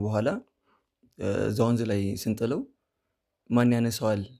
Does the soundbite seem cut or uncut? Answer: uncut